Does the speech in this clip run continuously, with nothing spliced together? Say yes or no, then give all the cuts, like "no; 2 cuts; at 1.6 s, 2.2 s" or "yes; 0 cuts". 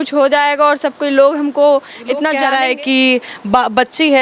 no; 1 cut; at 2.4 s